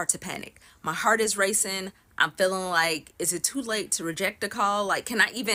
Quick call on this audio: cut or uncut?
uncut